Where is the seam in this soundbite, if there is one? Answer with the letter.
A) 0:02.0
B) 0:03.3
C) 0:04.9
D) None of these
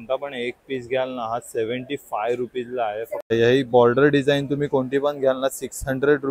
B